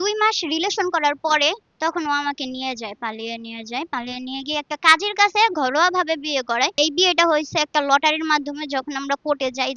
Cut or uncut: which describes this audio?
cut